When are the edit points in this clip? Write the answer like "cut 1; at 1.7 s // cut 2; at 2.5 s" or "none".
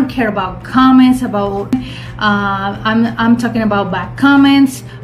cut 1; at 1.7 s